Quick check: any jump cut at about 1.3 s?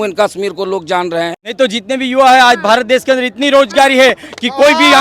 yes; 1 cut; at 1.3 s

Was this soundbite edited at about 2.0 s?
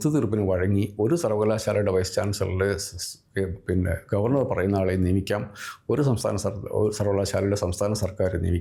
no; 0 cuts

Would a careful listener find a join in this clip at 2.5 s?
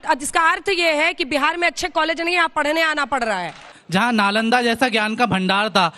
no; 1 cut; at 3.8 s

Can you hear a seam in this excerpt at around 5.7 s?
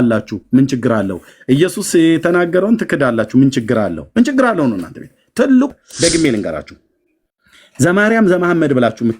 yes; 1 cut; at 5.7 s

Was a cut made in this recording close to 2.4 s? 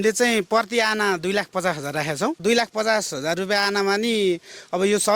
yes; 1 cut; at 2.4 s

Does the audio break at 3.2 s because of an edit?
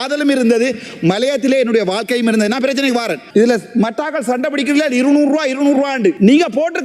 yes; 1 cut; at 3.2 s

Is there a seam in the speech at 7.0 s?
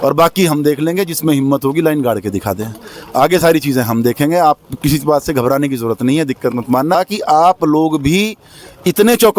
yes; 1 cut; at 7.0 s

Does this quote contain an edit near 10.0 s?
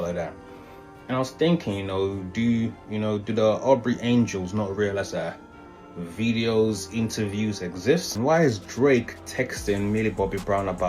no; 1 cut; at 8.2 s

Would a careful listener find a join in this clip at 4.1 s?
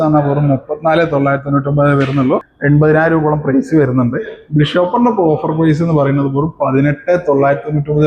no; 1 cut; at 2.5 s

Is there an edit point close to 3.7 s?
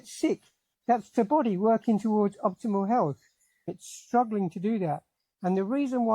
yes; 1 cut; at 3.7 s

